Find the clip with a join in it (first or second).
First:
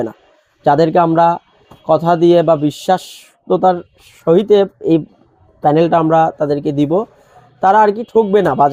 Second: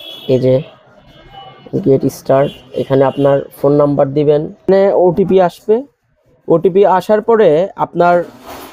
second